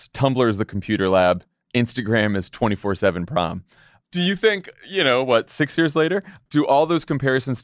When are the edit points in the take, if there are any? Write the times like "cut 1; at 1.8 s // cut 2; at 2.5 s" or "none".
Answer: cut 1; at 4.1 s // cut 2; at 6.4 s